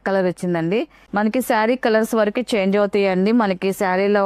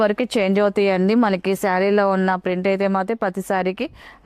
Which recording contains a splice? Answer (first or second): first